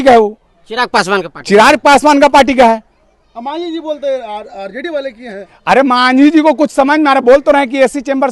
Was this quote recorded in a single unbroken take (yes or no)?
yes